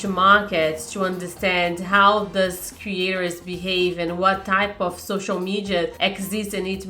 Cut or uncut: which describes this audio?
cut